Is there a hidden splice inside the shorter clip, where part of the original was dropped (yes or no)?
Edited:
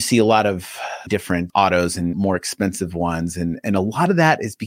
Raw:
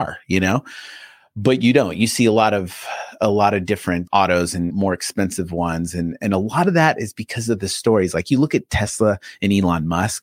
yes